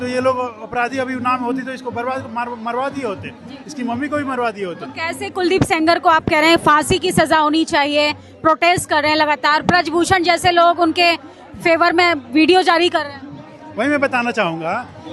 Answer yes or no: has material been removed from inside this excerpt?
no